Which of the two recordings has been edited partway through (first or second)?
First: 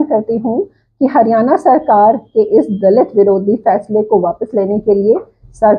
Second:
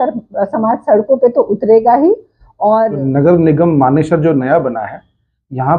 second